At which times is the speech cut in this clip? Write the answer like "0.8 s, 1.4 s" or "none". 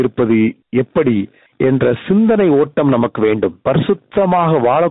3.6 s